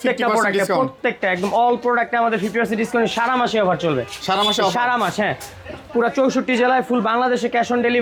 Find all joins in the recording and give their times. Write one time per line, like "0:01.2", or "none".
none